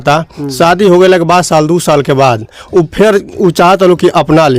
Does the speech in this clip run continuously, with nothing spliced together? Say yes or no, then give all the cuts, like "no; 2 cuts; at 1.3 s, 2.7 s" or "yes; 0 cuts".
yes; 0 cuts